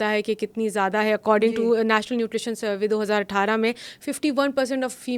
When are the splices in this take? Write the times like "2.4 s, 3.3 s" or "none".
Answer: none